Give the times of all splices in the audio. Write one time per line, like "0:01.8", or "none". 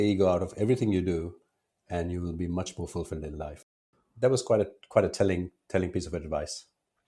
0:03.5